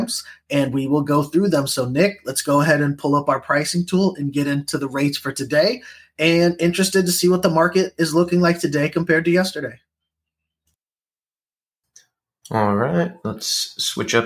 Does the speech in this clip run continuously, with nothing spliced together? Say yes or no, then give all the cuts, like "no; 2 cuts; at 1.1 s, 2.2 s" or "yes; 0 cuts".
yes; 0 cuts